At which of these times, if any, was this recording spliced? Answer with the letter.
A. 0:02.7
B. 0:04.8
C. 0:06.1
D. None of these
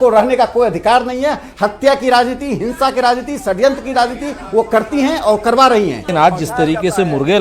C